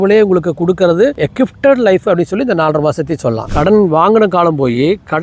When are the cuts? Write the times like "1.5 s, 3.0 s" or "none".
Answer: 3.5 s